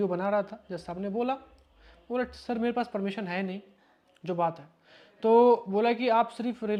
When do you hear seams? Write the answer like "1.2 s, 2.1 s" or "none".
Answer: none